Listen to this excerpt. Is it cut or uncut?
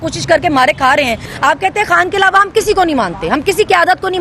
cut